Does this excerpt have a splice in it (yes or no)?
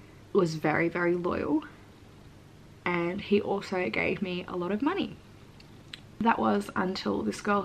no